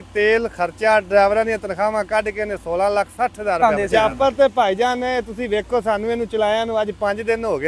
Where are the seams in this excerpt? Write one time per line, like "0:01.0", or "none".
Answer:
0:03.6